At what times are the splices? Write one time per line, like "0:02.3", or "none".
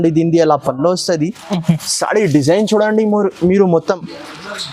none